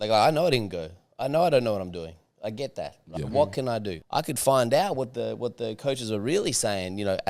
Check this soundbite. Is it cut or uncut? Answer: cut